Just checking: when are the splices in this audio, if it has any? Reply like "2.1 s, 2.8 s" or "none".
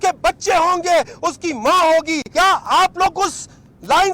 2.2 s